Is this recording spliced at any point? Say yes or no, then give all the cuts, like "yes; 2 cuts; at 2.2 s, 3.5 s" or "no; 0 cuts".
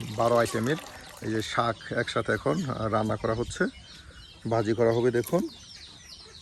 no; 0 cuts